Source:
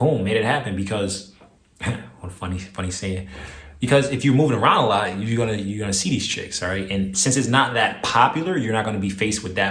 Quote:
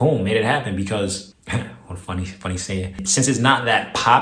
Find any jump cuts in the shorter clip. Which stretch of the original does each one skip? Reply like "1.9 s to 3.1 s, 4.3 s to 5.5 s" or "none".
1.3 s to 1.7 s, 3.4 s to 7.1 s